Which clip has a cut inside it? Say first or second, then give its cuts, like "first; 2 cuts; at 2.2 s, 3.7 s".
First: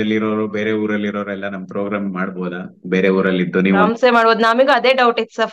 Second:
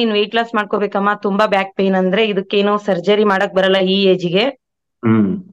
first; 1 cut; at 3.9 s